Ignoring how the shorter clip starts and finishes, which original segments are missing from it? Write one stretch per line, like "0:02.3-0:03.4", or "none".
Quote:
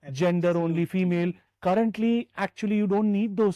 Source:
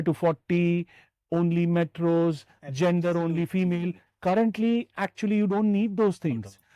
none